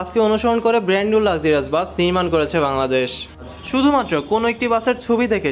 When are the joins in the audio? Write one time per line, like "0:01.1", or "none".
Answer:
0:03.5